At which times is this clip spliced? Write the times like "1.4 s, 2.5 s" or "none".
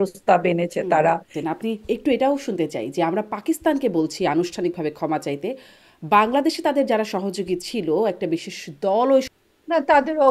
1.3 s, 9.3 s